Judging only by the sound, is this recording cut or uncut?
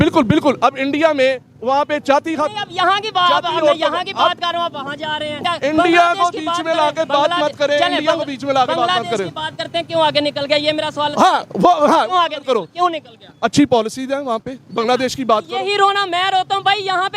cut